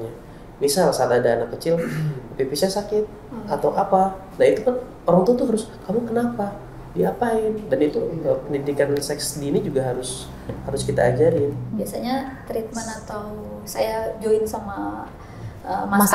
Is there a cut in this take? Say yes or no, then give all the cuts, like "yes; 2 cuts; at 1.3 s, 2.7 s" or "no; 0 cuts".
yes; 1 cut; at 11.7 s